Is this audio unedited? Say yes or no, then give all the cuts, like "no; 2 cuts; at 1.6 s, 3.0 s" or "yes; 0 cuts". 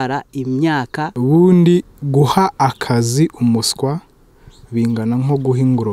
no; 1 cut; at 1.1 s